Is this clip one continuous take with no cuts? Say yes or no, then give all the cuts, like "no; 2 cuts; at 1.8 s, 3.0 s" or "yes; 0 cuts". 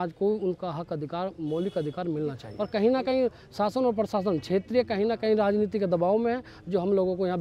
yes; 0 cuts